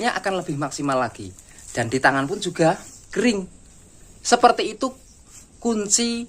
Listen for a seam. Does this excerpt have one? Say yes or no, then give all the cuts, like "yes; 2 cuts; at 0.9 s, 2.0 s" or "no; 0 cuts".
no; 0 cuts